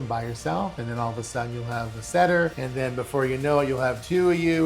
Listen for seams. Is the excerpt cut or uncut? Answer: cut